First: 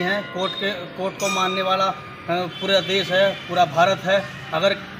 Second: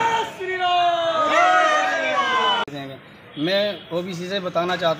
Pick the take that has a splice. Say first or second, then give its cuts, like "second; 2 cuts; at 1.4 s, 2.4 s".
second; 1 cut; at 2.7 s